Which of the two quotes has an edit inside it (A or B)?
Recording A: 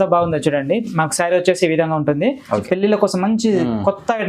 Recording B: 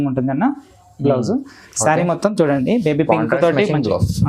A